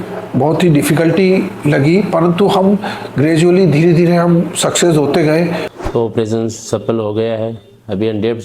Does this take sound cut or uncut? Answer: cut